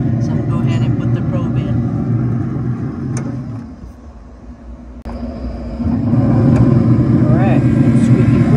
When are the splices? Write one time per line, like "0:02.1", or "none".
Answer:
none